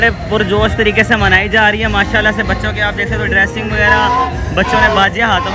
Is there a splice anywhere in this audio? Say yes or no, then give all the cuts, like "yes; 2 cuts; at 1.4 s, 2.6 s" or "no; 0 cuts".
no; 0 cuts